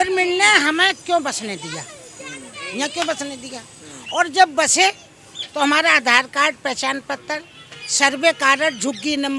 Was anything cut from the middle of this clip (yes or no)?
no